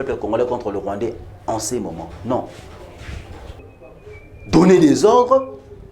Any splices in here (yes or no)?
yes